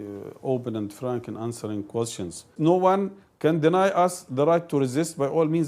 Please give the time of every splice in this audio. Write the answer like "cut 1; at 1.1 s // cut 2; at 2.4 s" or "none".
cut 1; at 2.5 s